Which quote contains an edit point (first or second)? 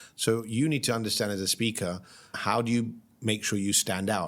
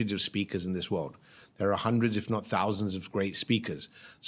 first